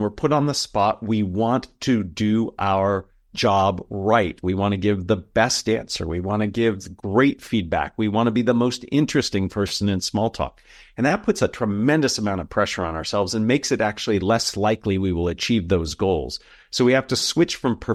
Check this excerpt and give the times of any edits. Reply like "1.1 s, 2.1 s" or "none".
none